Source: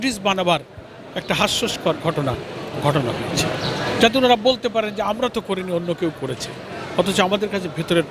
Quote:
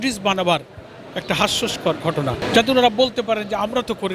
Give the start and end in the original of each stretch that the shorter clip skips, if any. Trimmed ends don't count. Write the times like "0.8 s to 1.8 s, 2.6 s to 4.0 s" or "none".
2.4 s to 3.9 s